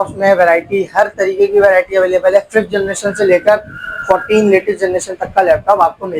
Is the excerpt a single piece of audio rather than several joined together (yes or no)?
yes